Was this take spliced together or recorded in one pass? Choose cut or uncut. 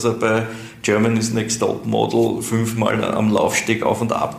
uncut